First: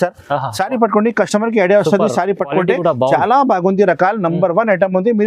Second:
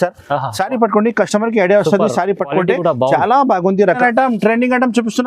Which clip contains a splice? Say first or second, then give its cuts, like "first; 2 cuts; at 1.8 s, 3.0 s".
second; 1 cut; at 4.0 s